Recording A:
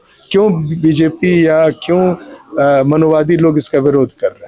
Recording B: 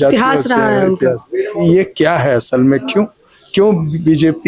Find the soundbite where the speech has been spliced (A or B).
B